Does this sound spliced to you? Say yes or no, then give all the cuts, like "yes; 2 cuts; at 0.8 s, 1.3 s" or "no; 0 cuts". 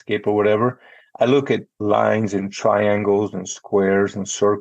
yes; 1 cut; at 1.7 s